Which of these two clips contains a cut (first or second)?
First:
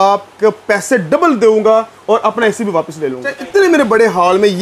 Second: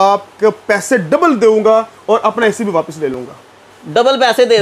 first